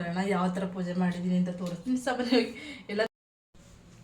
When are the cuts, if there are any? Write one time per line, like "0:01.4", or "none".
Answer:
0:03.1